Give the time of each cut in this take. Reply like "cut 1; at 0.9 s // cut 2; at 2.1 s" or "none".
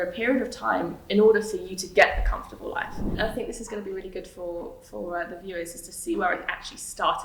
cut 1; at 3.0 s